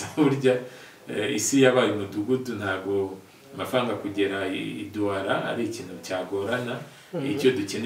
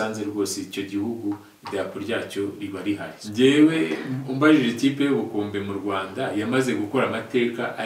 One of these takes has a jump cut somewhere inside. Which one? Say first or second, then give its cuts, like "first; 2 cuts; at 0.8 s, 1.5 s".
second; 1 cut; at 3.2 s